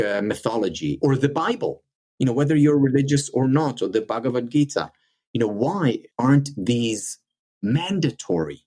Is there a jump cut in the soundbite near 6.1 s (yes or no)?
yes